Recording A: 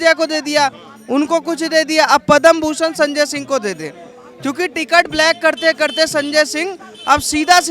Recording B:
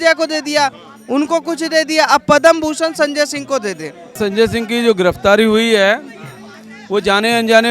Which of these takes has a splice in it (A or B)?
B